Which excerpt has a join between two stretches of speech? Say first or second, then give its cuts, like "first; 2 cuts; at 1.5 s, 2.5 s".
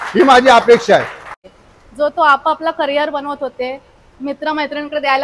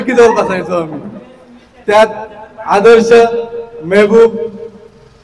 first; 1 cut; at 1.2 s